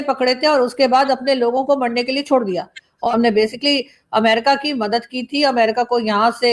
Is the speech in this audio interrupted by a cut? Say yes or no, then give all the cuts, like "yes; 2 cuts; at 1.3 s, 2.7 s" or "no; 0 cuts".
yes; 1 cut; at 2.9 s